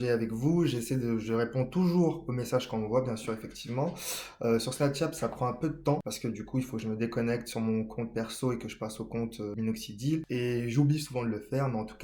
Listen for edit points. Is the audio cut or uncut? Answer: cut